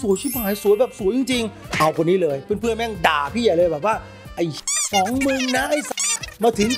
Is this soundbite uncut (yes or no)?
yes